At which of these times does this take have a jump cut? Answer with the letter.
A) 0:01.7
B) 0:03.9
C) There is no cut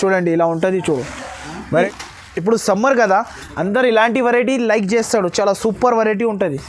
A